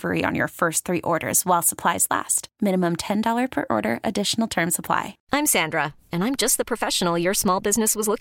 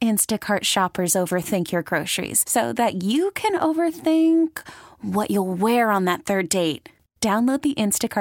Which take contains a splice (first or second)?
first